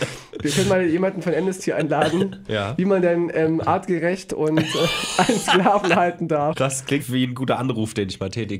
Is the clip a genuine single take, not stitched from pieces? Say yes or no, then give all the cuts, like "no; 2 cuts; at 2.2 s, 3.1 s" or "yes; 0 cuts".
no; 1 cut; at 6.9 s